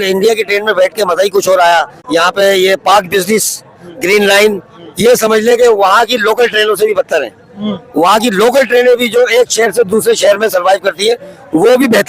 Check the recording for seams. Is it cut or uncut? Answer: cut